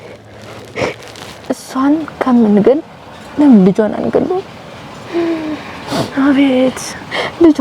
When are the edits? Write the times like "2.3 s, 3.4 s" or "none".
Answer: 1.4 s